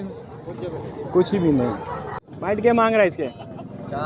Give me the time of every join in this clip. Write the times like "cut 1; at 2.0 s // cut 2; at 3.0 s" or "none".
cut 1; at 2.3 s